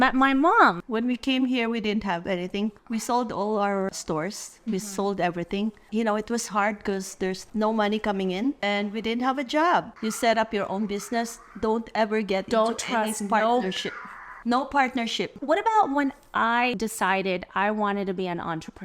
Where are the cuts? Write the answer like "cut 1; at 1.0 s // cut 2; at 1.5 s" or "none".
cut 1; at 0.8 s // cut 2; at 3.9 s // cut 3; at 5.9 s // cut 4; at 8.6 s // cut 5; at 9.9 s // cut 6; at 15.4 s // cut 7; at 16.7 s